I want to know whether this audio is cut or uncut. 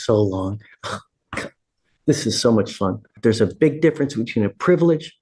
cut